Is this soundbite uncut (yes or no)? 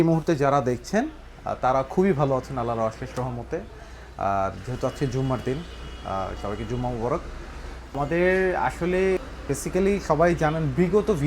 no